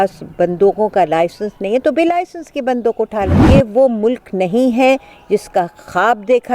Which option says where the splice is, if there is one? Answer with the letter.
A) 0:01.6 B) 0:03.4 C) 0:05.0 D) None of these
B